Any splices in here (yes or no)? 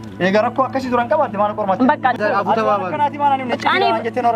yes